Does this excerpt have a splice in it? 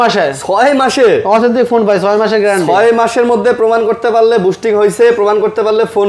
no; 0 cuts

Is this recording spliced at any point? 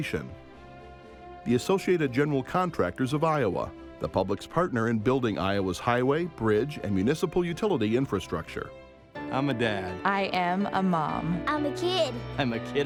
no; 0 cuts

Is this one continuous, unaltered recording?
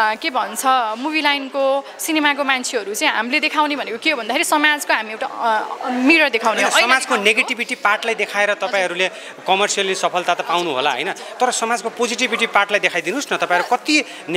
yes; 0 cuts

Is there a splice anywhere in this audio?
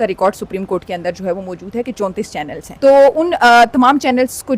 yes; 1 cut; at 2.6 s

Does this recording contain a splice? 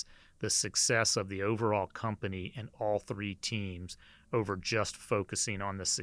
no; 0 cuts

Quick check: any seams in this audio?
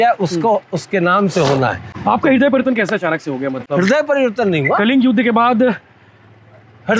no; 0 cuts

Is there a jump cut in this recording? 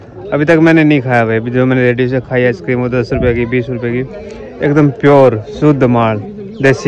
no; 0 cuts

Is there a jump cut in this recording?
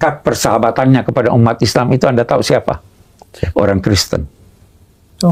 no; 0 cuts

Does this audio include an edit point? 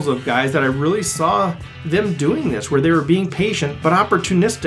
no; 0 cuts

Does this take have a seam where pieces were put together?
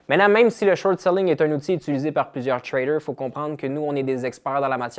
no; 0 cuts

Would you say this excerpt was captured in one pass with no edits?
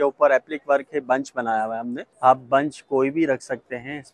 no; 1 cut; at 2.0 s

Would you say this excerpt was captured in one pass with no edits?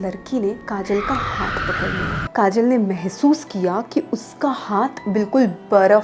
no; 1 cut; at 2.2 s

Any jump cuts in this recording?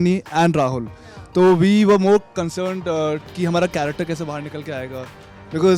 no; 0 cuts

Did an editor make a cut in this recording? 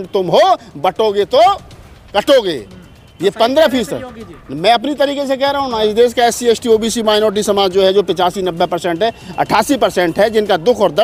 no; 0 cuts

